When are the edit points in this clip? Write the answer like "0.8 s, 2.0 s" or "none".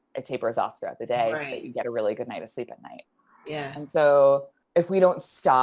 4.6 s